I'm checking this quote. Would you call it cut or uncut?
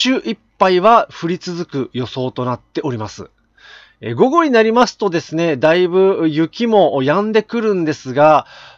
uncut